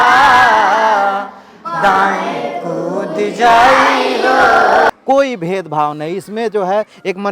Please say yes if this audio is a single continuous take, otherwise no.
no